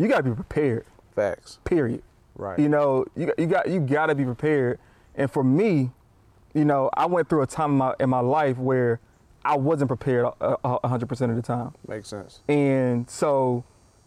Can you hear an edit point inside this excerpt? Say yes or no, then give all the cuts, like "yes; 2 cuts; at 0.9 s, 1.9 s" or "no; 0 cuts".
no; 0 cuts